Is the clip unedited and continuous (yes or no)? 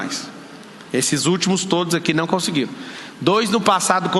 yes